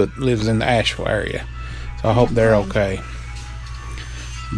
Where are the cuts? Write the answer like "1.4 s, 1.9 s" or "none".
none